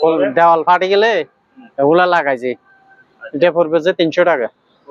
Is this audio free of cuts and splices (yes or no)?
yes